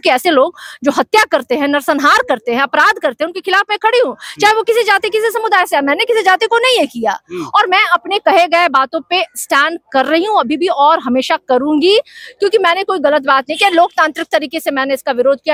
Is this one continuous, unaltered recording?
yes; 0 cuts

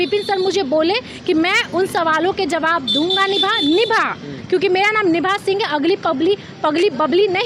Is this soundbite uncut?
yes; 0 cuts

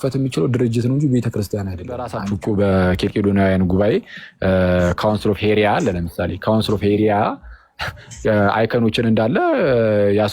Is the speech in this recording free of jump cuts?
no; 1 cut; at 2.2 s

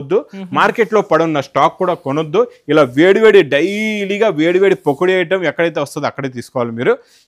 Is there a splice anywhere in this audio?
no; 0 cuts

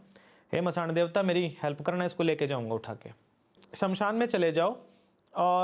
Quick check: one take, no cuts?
no; 1 cut; at 3.6 s

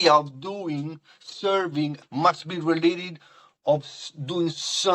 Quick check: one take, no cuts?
no; 1 cut; at 2.0 s

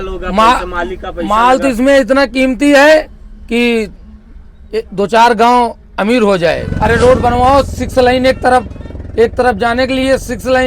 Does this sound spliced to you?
yes; 1 cut; at 6.7 s

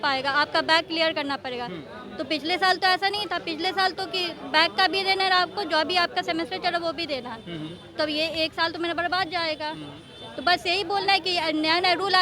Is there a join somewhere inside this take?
no; 0 cuts

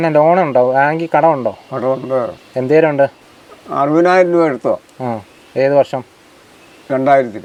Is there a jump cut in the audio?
no; 0 cuts

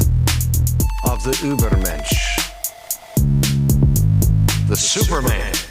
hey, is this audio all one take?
yes; 0 cuts

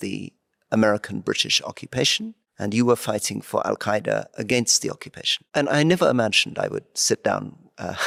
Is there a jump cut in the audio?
no; 0 cuts

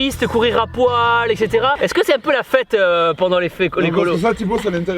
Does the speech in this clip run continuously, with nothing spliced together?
no; 1 cut; at 1.9 s

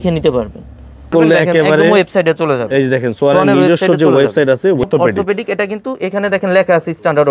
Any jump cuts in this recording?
yes; 2 cuts; at 1.1 s, 4.8 s

